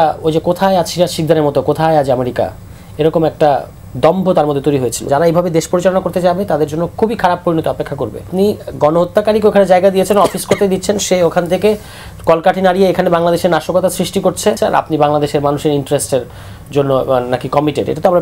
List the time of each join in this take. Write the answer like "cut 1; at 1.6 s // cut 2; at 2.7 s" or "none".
cut 1; at 5.1 s // cut 2; at 8.3 s // cut 3; at 14.6 s

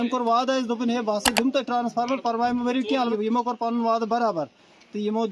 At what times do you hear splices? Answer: cut 1; at 3.1 s

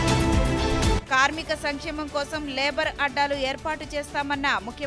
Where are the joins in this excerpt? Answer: cut 1; at 0.9 s

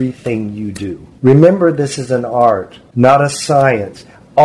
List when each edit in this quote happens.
cut 1; at 1.0 s // cut 2; at 2.8 s

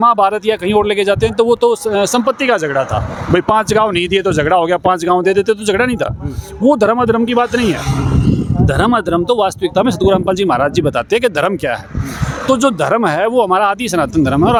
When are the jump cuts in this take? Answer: none

